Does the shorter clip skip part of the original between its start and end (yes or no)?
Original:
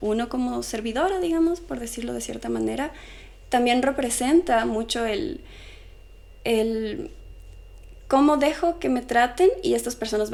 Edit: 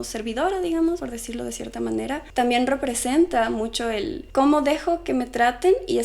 yes